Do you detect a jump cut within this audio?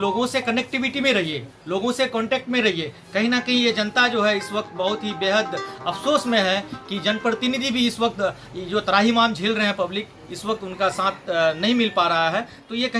no; 0 cuts

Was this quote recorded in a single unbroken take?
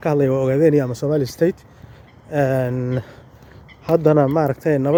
yes; 0 cuts

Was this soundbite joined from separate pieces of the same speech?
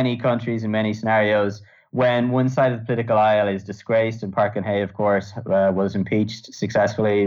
no; 0 cuts

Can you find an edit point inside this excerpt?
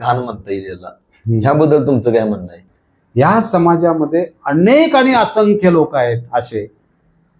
yes; 1 cut; at 2.8 s

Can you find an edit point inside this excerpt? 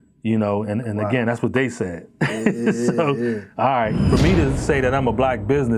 yes; 1 cut; at 4.0 s

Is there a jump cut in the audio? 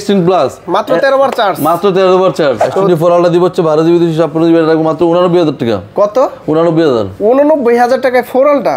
yes; 1 cut; at 2.6 s

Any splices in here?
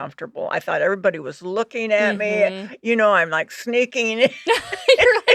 no; 0 cuts

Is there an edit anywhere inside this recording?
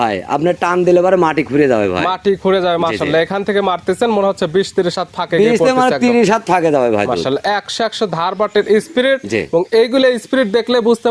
no; 0 cuts

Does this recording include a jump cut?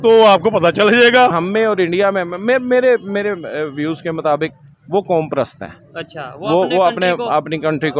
yes; 1 cut; at 1.3 s

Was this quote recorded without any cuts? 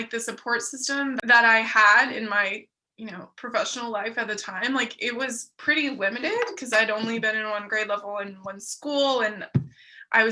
no; 1 cut; at 1.2 s

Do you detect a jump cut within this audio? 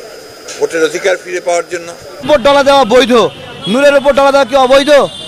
yes; 1 cut; at 2.3 s

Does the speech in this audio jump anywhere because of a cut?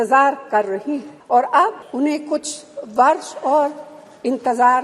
yes; 2 cuts; at 1.1 s, 1.8 s

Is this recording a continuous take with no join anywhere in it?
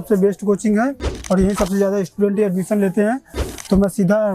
yes; 0 cuts

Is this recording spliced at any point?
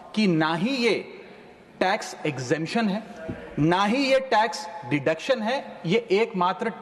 no; 0 cuts

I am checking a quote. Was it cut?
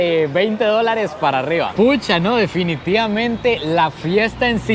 yes; 1 cut; at 1.7 s

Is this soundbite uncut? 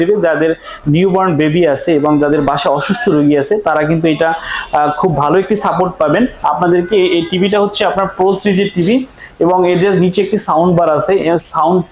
no; 1 cut; at 6.4 s

